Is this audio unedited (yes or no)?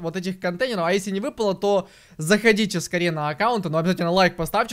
yes